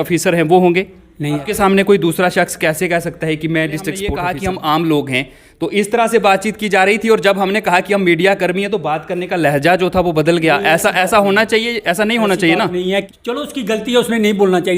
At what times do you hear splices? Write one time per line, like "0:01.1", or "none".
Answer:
0:01.5
0:04.1
0:13.1